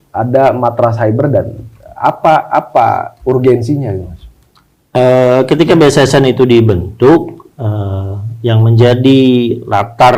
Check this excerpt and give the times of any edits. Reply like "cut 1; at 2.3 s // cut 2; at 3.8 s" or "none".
none